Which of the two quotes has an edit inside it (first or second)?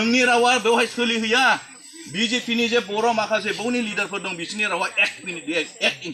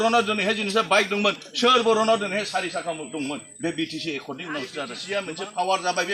second